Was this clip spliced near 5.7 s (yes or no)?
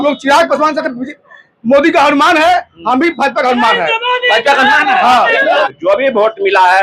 yes